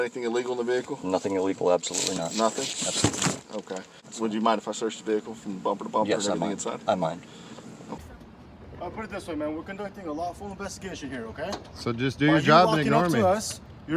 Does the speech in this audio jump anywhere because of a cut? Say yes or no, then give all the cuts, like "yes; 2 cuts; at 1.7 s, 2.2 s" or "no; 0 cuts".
yes; 2 cuts; at 4.0 s, 8.0 s